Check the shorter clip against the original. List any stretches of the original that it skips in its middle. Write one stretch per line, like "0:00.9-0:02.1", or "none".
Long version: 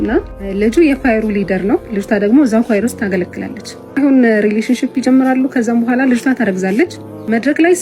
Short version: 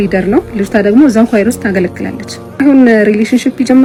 none